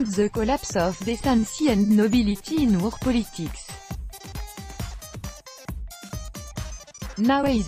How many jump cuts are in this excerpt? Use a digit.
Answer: 2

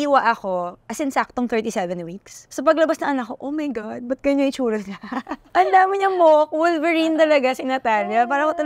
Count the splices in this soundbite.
1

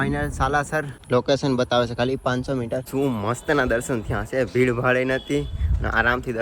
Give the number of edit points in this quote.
2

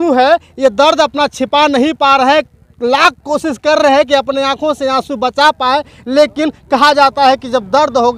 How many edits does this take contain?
0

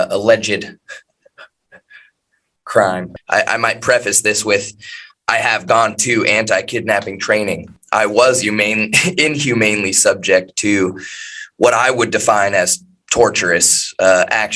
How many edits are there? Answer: 2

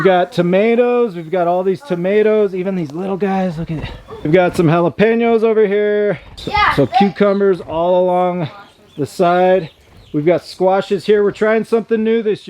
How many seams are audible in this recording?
2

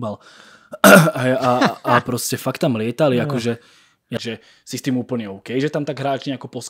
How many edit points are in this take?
1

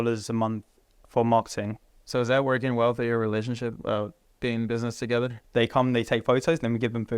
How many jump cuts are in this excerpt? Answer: 2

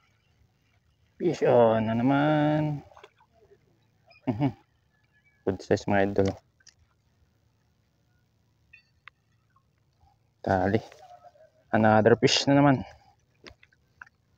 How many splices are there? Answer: 0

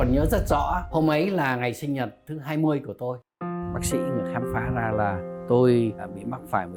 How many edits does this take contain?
0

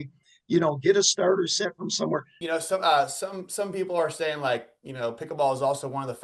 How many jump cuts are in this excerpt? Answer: 1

